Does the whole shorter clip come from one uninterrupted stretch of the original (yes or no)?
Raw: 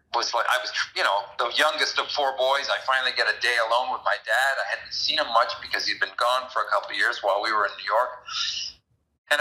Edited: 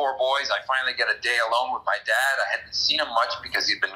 yes